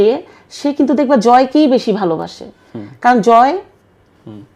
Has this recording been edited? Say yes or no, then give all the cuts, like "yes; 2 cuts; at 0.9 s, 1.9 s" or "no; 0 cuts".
no; 0 cuts